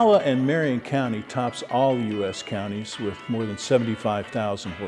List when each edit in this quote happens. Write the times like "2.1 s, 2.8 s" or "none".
3.2 s